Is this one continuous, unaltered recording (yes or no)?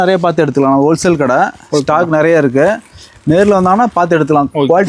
yes